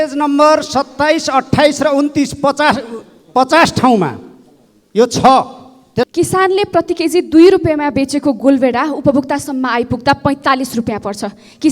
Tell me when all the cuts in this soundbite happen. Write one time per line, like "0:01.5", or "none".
0:06.1